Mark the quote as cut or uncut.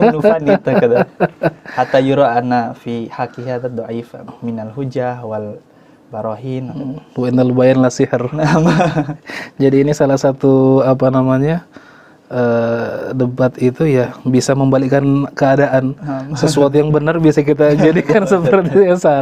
uncut